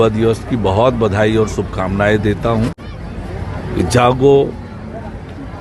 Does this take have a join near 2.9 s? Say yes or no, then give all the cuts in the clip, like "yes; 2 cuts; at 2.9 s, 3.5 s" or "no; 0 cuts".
yes; 1 cut; at 2.9 s